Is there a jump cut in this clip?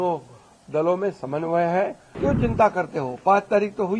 yes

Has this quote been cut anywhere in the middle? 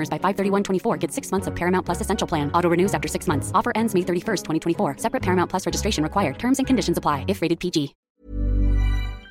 yes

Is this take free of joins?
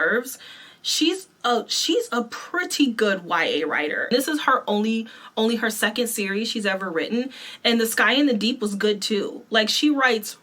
no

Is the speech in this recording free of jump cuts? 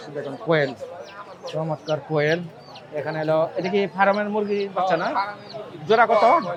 yes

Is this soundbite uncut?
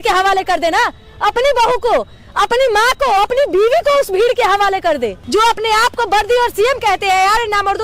no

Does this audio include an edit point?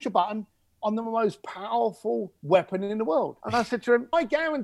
yes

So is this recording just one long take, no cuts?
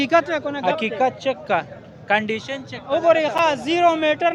yes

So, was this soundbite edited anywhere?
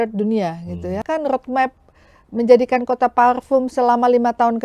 yes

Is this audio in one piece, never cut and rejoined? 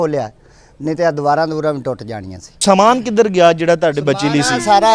no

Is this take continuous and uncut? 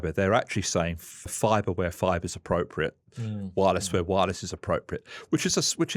yes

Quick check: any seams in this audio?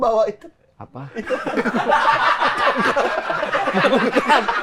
no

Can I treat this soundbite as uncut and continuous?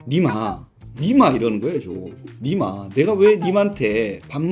yes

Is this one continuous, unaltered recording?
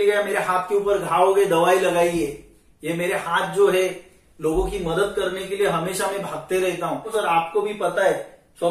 no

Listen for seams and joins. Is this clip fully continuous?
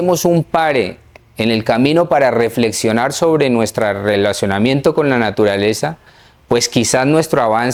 yes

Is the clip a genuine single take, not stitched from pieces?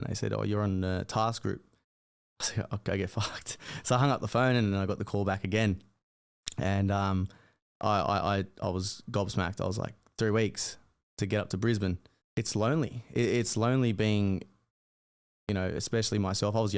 no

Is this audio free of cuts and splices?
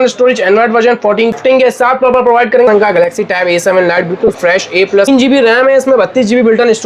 no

